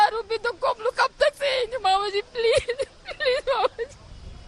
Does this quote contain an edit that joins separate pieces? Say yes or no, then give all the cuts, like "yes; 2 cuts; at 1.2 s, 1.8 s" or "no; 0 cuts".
no; 0 cuts